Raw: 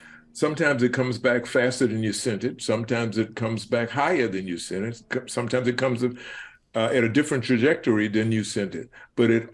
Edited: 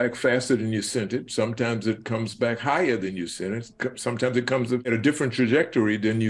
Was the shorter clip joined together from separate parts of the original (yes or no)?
yes